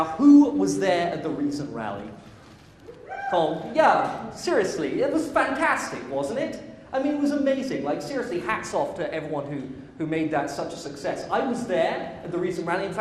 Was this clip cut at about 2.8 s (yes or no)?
no